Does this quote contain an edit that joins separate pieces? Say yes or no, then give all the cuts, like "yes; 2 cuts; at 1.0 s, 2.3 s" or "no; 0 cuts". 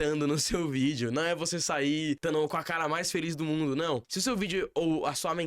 yes; 2 cuts; at 2.2 s, 4.1 s